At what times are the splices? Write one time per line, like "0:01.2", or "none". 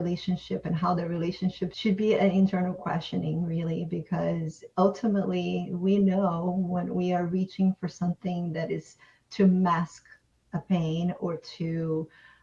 0:01.7

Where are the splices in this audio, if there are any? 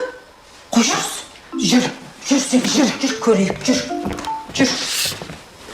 none

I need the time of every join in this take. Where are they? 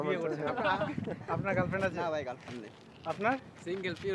0:01.2

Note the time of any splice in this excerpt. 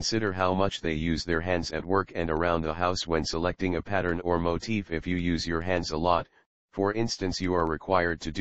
none

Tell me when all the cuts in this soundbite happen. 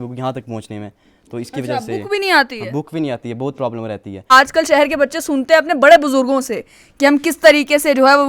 0:04.3

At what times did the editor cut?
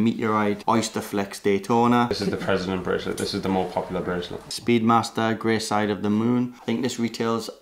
0:02.1
0:04.5
0:06.6

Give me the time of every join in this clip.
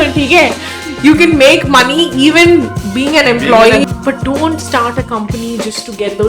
0:03.9

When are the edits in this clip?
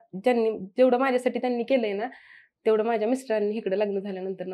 none

